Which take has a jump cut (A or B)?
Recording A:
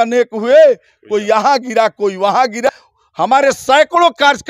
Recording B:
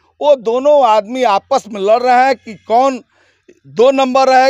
A